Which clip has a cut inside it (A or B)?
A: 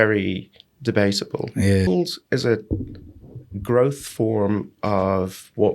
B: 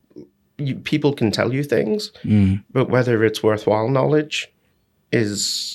A